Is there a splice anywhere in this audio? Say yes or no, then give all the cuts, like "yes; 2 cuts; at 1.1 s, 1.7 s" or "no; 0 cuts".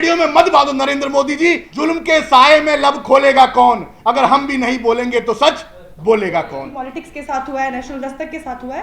yes; 2 cuts; at 1.7 s, 6.8 s